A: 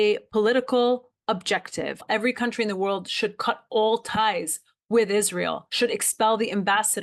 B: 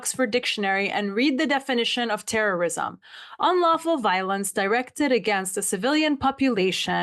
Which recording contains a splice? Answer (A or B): A